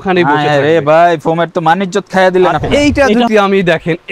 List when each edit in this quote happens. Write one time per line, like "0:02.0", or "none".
0:02.6